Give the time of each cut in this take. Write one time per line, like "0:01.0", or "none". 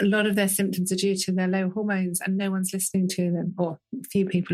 none